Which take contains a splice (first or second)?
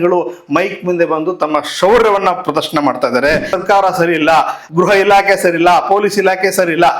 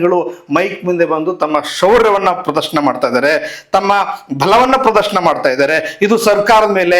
first